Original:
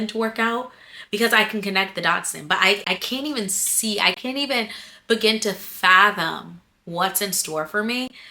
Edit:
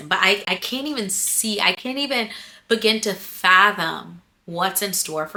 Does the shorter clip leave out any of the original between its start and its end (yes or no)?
no